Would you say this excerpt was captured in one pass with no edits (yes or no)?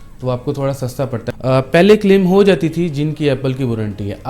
no